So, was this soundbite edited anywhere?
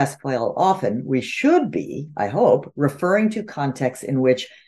no; 0 cuts

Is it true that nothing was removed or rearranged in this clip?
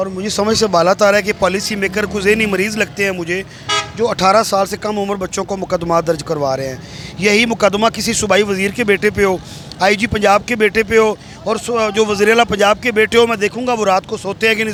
yes; 0 cuts

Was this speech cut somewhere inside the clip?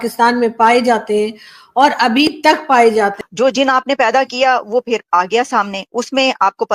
yes; 1 cut; at 3.2 s

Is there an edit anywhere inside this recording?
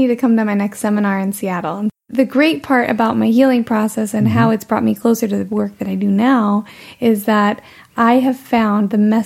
yes; 1 cut; at 2.0 s

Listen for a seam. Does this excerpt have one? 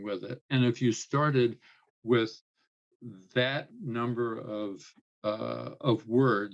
no; 0 cuts

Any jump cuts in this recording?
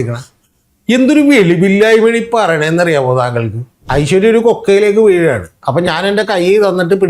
yes; 1 cut; at 3.8 s

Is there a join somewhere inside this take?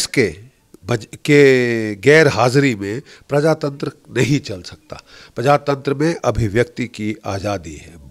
no; 0 cuts

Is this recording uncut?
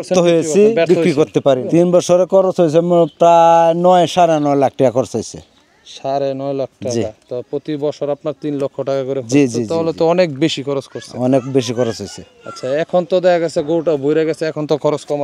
no; 1 cut; at 1.6 s

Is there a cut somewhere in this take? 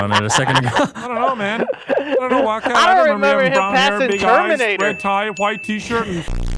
no; 0 cuts

